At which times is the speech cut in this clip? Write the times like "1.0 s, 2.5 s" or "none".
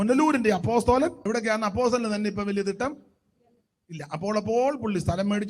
1.2 s